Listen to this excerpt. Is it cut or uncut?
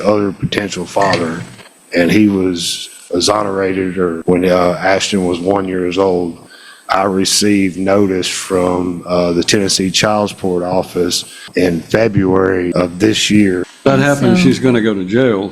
cut